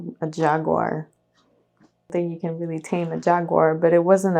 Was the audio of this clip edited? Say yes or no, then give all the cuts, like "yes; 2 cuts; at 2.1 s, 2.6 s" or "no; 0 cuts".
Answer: yes; 1 cut; at 2.1 s